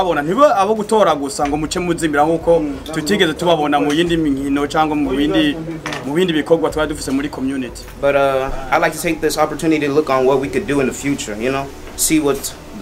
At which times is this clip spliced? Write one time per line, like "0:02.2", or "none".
0:07.8

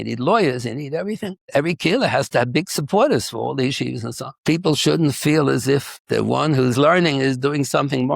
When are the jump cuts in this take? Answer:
0:01.4
0:04.3
0:05.9

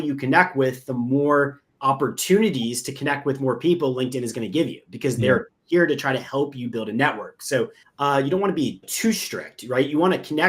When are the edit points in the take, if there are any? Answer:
0:01.7
0:07.8

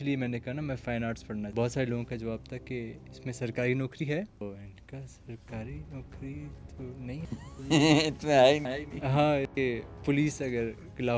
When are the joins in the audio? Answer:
0:01.5
0:04.4
0:09.4

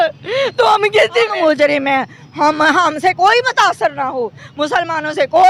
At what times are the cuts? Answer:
0:01.3

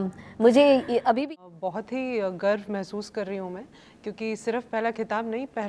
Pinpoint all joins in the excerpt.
0:01.1

